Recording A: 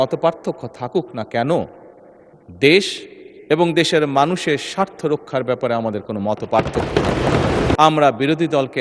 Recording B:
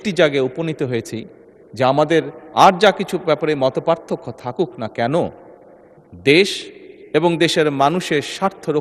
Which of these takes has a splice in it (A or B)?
A